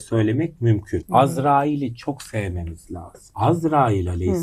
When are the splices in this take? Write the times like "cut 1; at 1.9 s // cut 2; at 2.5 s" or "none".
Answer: cut 1; at 1.0 s // cut 2; at 3.2 s